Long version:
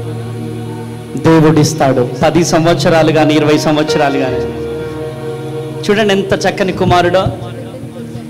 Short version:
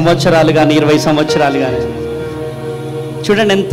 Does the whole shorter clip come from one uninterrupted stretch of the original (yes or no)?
yes